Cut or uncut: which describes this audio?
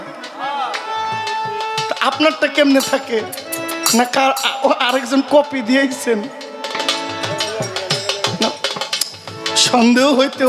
uncut